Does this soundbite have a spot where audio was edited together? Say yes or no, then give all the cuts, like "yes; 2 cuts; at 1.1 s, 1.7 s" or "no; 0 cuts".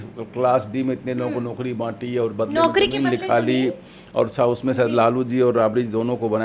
no; 0 cuts